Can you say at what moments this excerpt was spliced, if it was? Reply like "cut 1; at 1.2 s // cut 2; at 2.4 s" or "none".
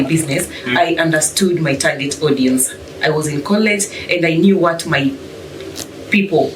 none

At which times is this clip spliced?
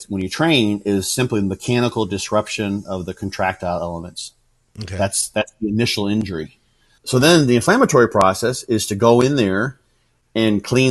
cut 1; at 6.9 s

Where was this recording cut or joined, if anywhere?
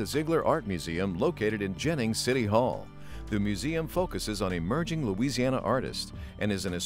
none

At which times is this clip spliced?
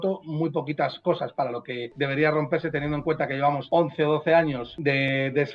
cut 1; at 1.9 s // cut 2; at 3.6 s // cut 3; at 4.7 s

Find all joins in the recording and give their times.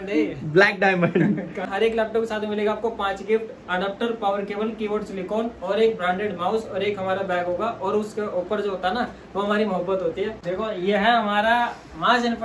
cut 1; at 1.7 s // cut 2; at 10.4 s

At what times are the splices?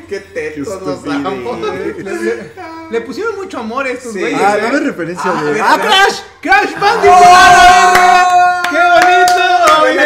none

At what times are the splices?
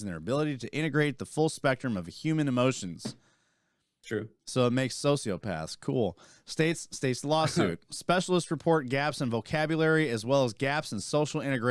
none

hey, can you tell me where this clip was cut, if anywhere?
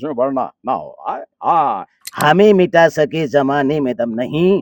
cut 1; at 2.0 s

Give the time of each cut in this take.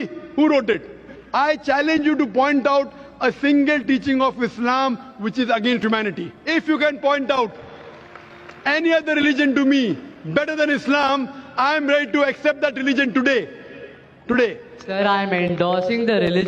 cut 1; at 1.2 s // cut 2; at 6.3 s // cut 3; at 14.8 s

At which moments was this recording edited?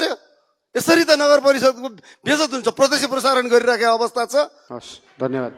cut 1; at 4.7 s

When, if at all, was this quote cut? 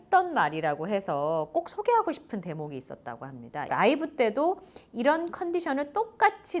cut 1; at 3.7 s

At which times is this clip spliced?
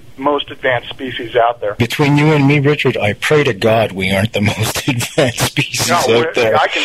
cut 1; at 1.7 s

